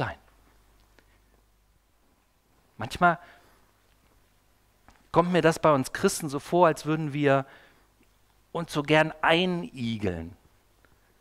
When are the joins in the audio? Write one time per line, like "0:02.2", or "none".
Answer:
0:02.0